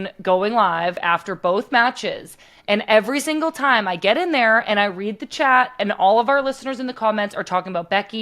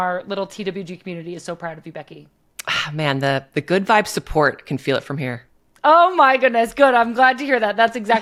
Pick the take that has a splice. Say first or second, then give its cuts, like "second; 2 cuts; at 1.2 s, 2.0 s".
first; 1 cut; at 1.0 s